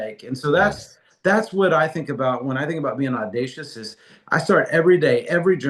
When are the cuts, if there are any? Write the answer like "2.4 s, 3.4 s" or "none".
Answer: none

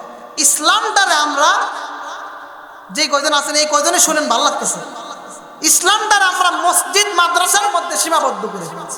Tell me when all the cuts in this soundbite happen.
none

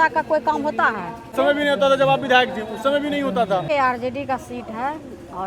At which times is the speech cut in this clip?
1.3 s, 3.6 s

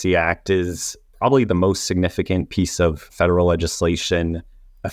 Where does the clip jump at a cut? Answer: 3.0 s

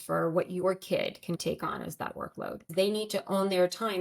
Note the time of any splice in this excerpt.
1.4 s, 2.7 s

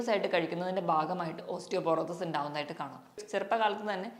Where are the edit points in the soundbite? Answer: 3.2 s

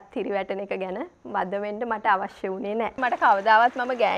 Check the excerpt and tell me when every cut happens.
3.0 s

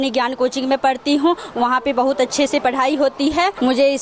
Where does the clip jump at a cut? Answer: none

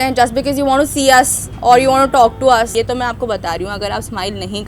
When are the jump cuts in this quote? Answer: 2.7 s

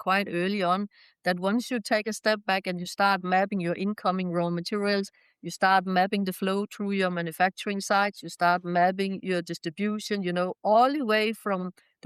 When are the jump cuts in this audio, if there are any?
none

